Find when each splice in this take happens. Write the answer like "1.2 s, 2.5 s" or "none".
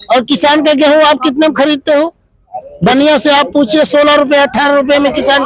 none